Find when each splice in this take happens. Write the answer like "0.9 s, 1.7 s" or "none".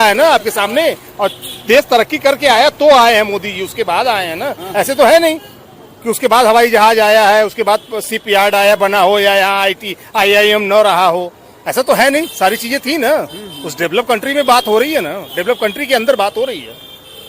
none